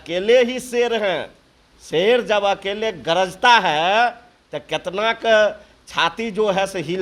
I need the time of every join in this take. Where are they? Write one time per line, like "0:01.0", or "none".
none

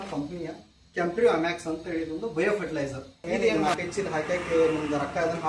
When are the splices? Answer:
0:03.6

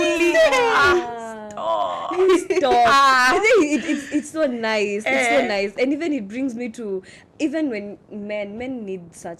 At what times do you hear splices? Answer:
none

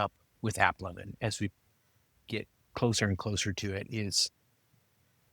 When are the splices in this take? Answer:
0:01.1

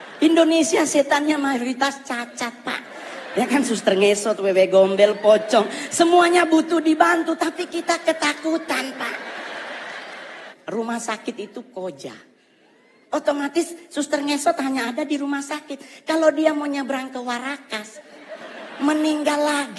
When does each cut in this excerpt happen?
0:10.5

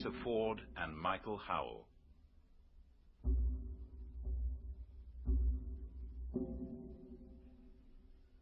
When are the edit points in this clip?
none

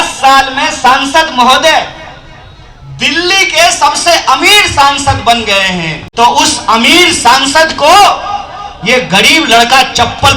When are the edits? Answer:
0:06.0

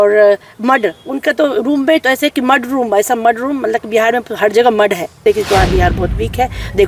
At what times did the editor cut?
0:05.2

